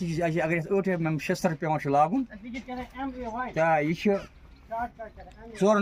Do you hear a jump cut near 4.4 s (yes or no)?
no